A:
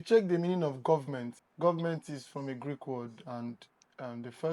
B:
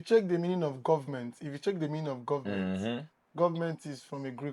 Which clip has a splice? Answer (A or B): A